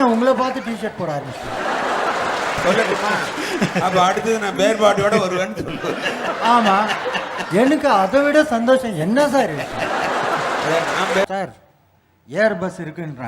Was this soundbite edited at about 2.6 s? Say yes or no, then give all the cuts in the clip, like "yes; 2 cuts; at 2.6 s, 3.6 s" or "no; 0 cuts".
yes; 2 cuts; at 2.6 s, 11.3 s